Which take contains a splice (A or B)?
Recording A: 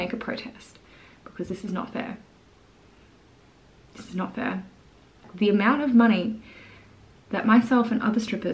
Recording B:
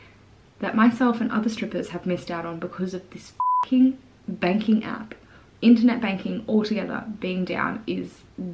A